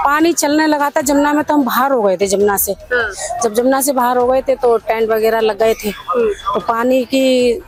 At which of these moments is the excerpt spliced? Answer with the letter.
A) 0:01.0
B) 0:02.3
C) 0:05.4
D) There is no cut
D